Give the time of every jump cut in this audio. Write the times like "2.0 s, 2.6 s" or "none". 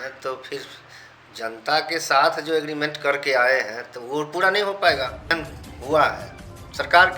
5.3 s